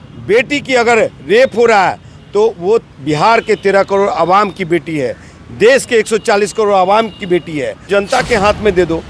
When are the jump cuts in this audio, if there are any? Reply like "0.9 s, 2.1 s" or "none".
7.8 s